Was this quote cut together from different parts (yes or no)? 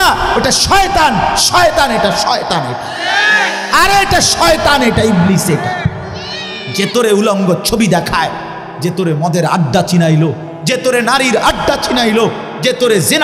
no